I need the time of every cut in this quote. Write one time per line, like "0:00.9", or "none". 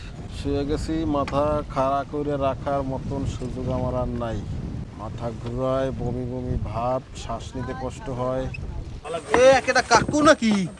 0:09.0

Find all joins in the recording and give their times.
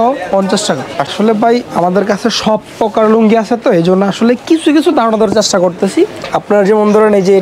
0:01.1
0:06.2

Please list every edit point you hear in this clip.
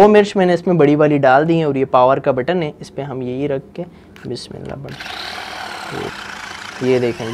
0:06.1

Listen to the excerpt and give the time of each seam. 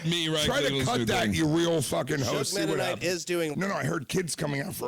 0:03.5

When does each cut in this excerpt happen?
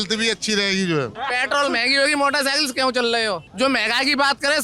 0:01.2
0:03.5

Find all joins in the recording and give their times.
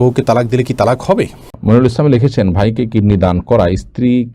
0:01.4

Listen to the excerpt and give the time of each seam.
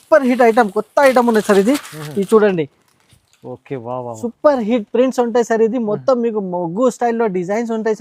none

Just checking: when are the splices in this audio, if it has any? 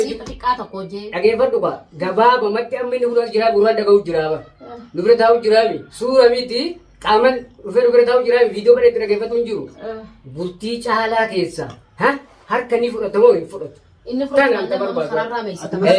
none

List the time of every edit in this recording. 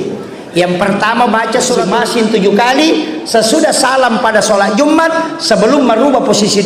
0:01.8

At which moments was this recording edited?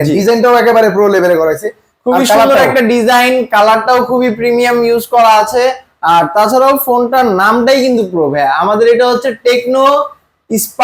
none

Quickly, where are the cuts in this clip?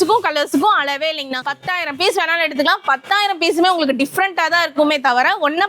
0:01.5

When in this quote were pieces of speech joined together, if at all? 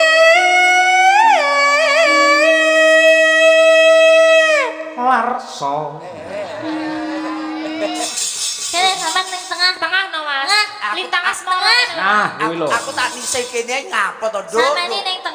0:08.1

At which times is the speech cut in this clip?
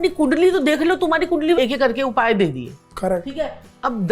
0:01.6

